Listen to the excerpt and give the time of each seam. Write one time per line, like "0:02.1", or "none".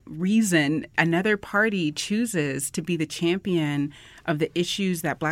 none